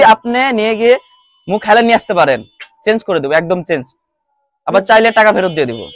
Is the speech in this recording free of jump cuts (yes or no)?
yes